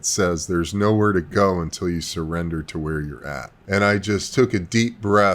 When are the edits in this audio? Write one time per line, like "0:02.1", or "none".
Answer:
0:03.5